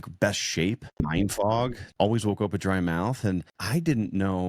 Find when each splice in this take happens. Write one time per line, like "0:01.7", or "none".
0:01.0
0:01.8
0:03.6